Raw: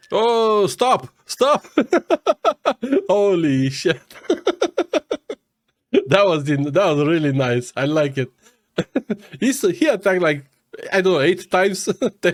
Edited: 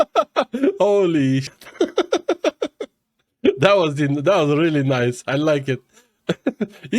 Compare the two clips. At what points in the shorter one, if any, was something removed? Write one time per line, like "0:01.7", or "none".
0:01.5